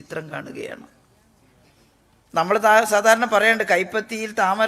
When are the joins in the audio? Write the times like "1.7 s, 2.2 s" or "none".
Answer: none